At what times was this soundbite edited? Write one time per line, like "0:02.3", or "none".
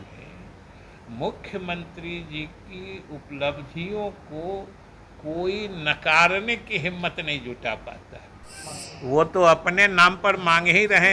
0:08.6